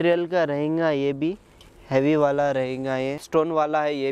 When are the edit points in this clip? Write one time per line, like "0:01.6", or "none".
0:03.2